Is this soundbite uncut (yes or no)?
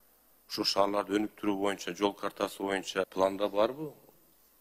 no